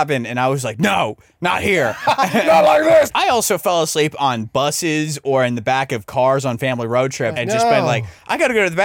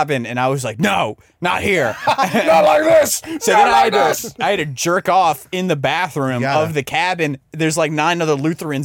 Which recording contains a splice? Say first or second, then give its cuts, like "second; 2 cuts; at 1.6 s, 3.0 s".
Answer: first; 2 cuts; at 3.1 s, 7.4 s